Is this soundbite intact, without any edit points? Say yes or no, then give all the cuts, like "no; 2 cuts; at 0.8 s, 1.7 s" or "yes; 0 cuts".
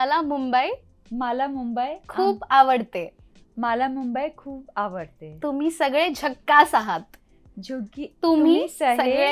yes; 0 cuts